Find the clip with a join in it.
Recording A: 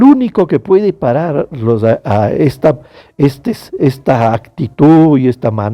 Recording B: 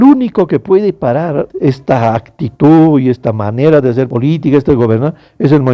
B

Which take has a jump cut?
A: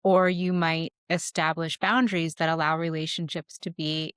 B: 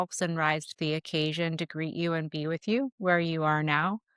B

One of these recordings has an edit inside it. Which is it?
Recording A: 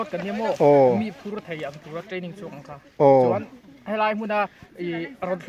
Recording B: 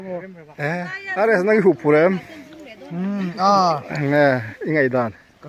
B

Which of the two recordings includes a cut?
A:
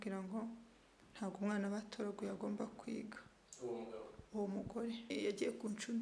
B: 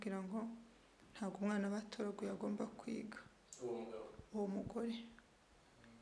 A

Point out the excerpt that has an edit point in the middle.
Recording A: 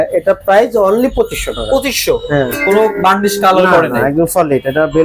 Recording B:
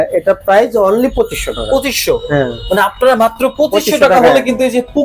A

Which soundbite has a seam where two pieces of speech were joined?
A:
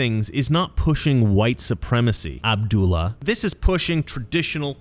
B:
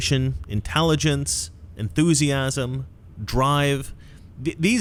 A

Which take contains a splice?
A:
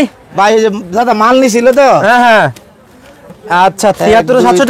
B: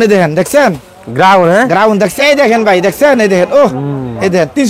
B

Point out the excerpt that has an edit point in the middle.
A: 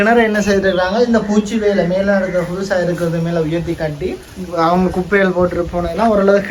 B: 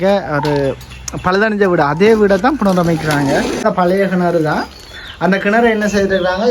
B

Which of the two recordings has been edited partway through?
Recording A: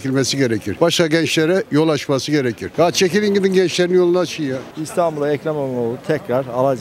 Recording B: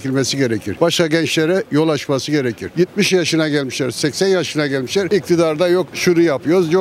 A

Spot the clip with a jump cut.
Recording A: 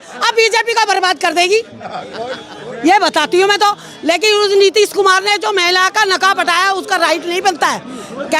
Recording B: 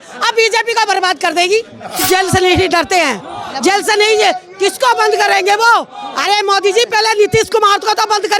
B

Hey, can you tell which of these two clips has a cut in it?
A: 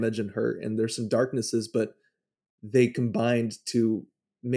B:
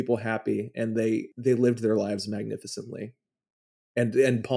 B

